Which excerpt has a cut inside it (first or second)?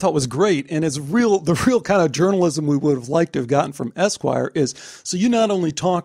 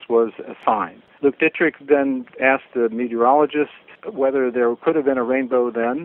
second